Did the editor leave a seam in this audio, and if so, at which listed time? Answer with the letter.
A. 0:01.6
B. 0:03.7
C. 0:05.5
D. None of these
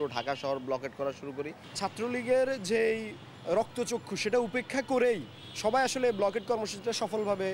A